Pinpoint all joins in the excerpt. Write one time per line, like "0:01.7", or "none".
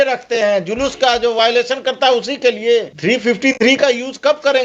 0:02.9